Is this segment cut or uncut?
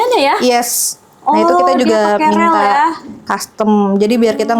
uncut